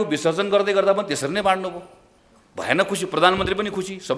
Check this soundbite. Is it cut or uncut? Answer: uncut